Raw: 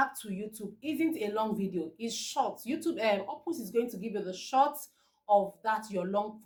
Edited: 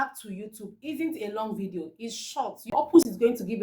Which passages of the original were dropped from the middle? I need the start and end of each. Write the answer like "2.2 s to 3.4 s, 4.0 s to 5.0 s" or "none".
2.7 s to 3.2 s